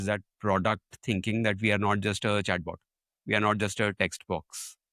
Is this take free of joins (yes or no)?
yes